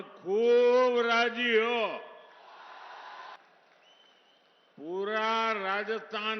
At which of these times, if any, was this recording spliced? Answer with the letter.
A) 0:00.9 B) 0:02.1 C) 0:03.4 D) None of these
C